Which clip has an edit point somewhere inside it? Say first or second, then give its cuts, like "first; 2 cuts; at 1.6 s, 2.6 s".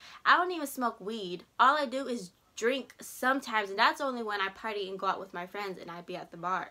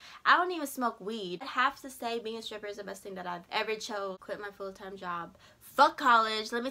second; 2 cuts; at 1.5 s, 4.2 s